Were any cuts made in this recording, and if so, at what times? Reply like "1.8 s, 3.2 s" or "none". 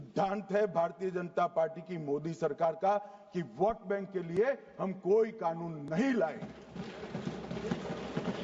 none